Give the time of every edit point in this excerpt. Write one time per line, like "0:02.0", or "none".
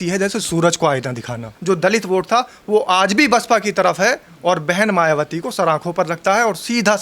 0:01.5